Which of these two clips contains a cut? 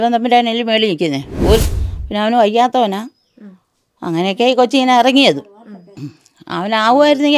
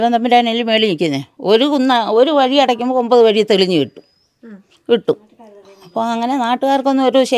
first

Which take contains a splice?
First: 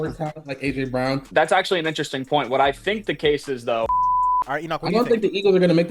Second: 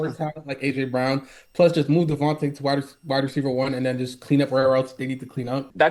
first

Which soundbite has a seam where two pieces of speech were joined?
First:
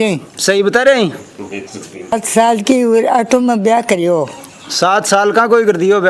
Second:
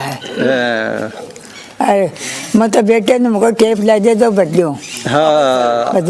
first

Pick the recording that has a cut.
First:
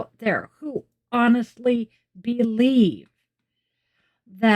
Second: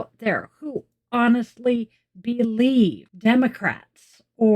second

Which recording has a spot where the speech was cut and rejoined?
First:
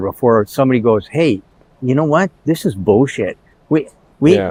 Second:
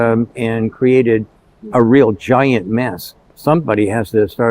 second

